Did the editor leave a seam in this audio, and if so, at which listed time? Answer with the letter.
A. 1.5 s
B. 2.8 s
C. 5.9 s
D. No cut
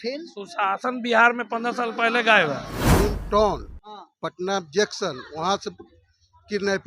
B